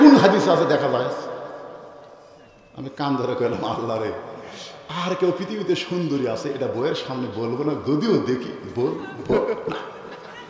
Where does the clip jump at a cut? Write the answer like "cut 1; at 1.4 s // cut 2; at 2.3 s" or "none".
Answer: none

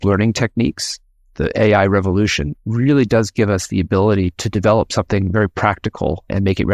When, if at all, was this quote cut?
cut 1; at 2.5 s

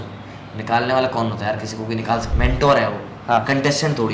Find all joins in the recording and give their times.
cut 1; at 2.3 s

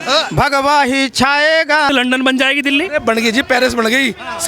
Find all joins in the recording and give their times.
cut 1; at 1.9 s

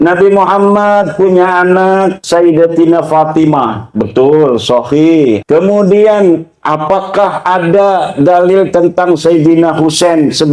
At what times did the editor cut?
cut 1; at 2.2 s // cut 2; at 5.4 s

